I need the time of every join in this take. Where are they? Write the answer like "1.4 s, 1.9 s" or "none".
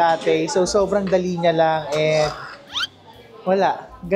none